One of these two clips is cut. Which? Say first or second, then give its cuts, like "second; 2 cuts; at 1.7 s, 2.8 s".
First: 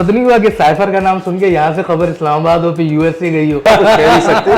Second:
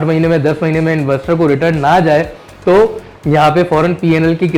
first; 1 cut; at 3.6 s